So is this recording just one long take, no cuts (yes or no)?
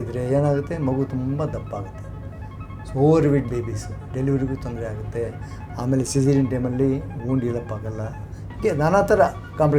yes